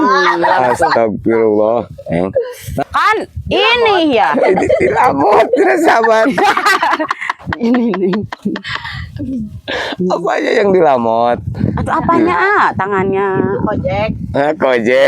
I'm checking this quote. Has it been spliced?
yes; 1 cut; at 2.6 s

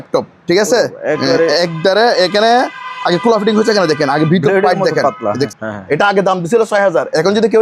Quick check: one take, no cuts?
no; 1 cut; at 5.5 s

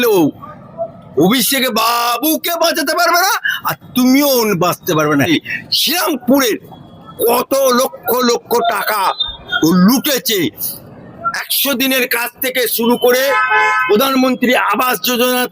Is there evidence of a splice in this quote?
yes; 1 cut; at 5.3 s

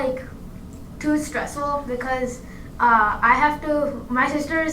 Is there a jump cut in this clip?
no; 0 cuts

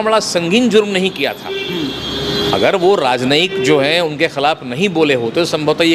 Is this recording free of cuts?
yes; 0 cuts

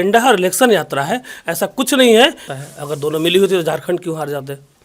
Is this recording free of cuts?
no; 1 cut; at 2.5 s

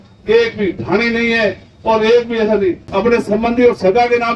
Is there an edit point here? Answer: yes; 1 cut; at 2.8 s

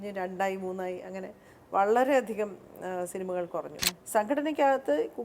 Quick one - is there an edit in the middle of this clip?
yes; 1 cut; at 3.8 s

